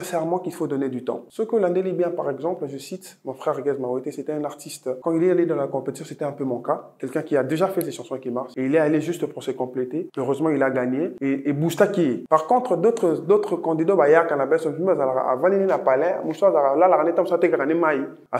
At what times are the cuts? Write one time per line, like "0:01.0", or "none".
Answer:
0:01.3